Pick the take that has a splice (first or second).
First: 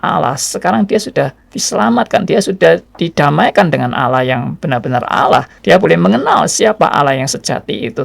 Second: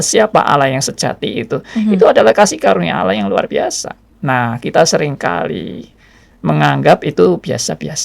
first